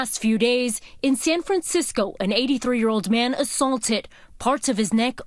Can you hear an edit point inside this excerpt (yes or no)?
no